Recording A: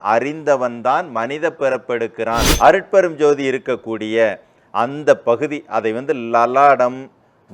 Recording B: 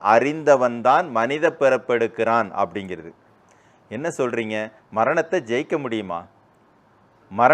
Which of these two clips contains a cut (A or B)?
A